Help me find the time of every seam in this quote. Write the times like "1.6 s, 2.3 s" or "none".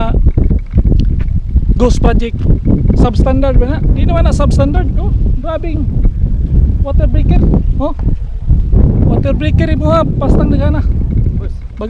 none